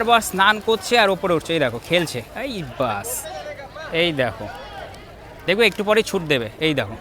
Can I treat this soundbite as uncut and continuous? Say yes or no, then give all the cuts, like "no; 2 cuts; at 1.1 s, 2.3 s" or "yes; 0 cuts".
yes; 0 cuts